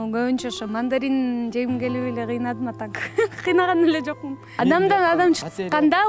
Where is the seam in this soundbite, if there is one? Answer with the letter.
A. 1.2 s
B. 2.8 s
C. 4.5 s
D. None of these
C